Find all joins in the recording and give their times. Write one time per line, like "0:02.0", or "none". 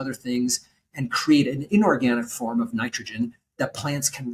none